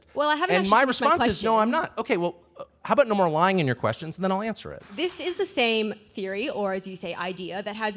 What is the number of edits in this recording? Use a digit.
1